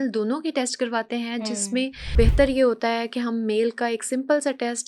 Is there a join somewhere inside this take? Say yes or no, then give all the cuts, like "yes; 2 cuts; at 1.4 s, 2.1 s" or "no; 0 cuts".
yes; 1 cut; at 2.1 s